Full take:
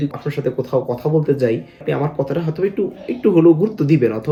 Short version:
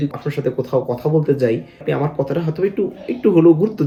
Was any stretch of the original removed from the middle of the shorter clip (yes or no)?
no